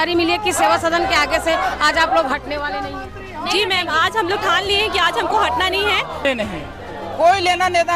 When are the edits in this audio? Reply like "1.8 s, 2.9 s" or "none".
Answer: 6.2 s